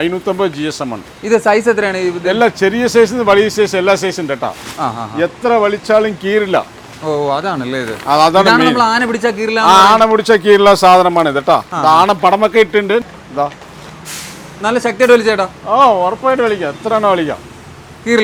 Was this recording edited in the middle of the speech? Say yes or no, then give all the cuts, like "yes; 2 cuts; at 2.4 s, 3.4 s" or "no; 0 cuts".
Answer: no; 0 cuts